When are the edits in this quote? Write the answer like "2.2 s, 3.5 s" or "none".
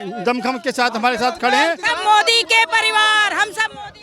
1.9 s